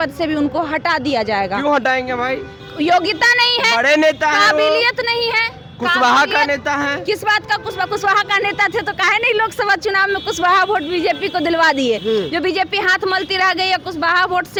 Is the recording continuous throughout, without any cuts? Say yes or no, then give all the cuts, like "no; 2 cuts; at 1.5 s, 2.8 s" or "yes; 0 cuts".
yes; 0 cuts